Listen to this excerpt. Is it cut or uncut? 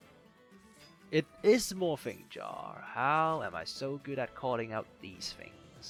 uncut